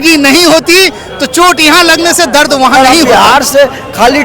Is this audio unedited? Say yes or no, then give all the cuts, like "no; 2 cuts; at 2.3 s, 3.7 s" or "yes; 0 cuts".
no; 1 cut; at 2.8 s